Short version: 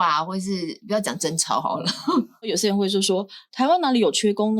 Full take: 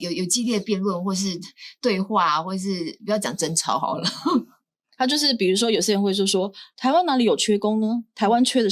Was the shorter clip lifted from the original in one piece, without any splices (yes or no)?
no